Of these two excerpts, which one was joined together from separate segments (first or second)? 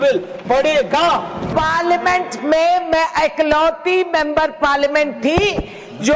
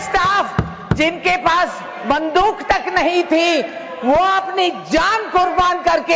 first